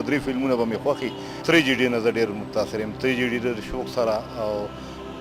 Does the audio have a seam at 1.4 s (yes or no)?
yes